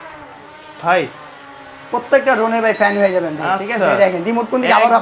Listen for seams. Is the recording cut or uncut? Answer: uncut